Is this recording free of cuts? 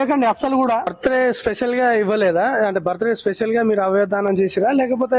no; 1 cut; at 0.9 s

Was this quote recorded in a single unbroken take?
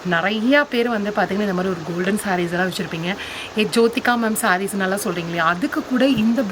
yes; 0 cuts

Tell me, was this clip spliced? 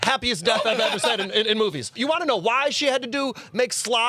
yes; 1 cut; at 1.9 s

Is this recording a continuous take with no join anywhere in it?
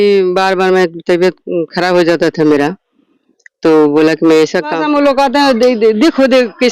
no; 1 cut; at 4.8 s

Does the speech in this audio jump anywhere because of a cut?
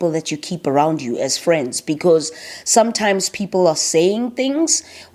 no; 0 cuts

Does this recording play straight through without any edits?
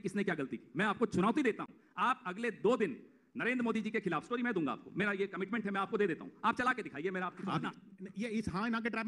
no; 1 cut; at 7.7 s

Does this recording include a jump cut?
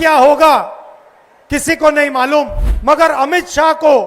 yes; 1 cut; at 2.6 s

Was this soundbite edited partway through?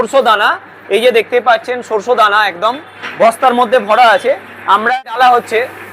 yes; 1 cut; at 5.0 s

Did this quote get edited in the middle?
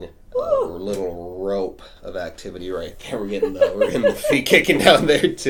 no; 0 cuts

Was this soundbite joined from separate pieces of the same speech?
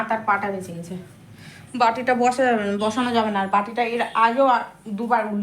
no; 0 cuts

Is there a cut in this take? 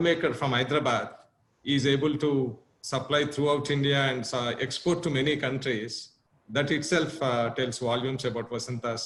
no; 0 cuts

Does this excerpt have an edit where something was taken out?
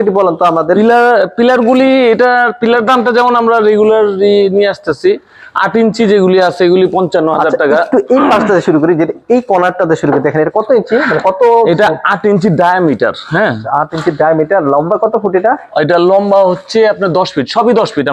no; 0 cuts

